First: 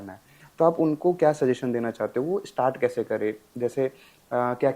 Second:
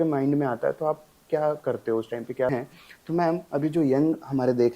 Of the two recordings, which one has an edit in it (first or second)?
second